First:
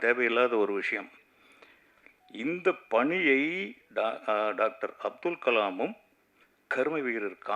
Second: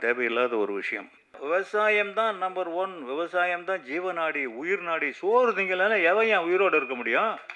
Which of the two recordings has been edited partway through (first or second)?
second